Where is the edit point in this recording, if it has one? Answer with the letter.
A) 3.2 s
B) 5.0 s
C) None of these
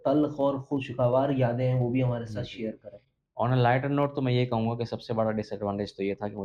C